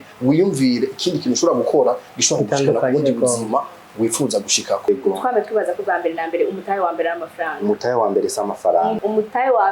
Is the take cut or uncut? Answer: cut